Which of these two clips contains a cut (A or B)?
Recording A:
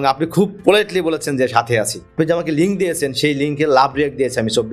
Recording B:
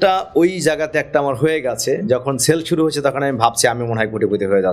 A